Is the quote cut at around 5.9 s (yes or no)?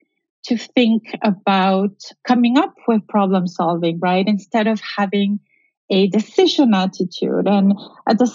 no